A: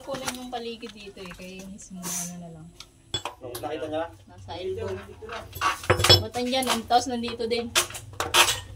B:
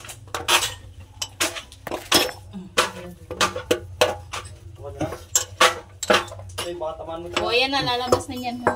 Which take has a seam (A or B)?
A